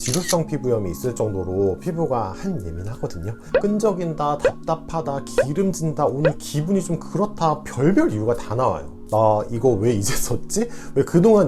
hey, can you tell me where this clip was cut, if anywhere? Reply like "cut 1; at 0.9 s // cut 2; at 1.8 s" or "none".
cut 1; at 3.4 s // cut 2; at 9.0 s

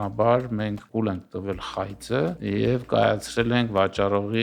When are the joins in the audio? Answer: cut 1; at 2.4 s

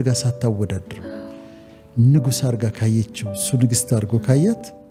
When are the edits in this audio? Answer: none

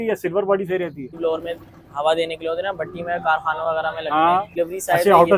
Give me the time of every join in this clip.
cut 1; at 1.1 s // cut 2; at 4.5 s

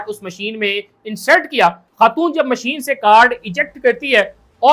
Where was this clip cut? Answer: cut 1; at 1.9 s

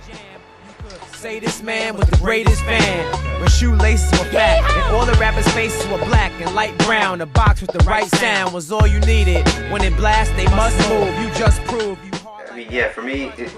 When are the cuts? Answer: cut 1; at 2.7 s

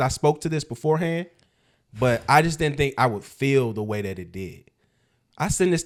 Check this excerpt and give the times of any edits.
none

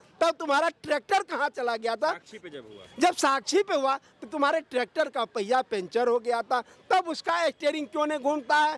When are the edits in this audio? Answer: none

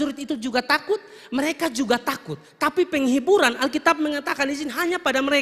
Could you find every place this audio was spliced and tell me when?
none

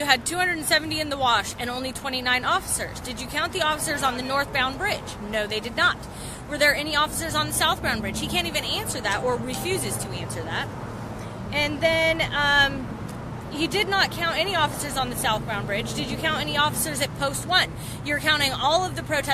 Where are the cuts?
cut 1; at 5.7 s

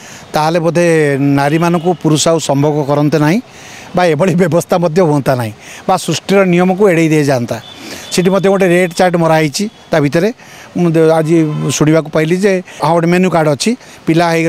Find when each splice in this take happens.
none

